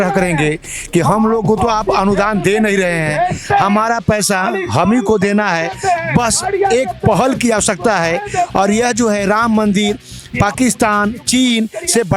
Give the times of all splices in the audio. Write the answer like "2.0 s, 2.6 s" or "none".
none